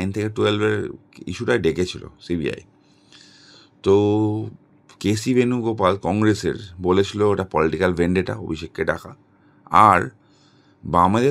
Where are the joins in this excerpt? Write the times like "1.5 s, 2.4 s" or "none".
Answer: none